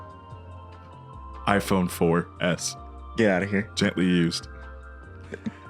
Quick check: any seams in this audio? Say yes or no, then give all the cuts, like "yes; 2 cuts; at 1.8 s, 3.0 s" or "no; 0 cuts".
yes; 1 cut; at 3.7 s